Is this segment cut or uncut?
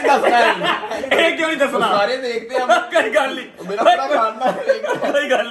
uncut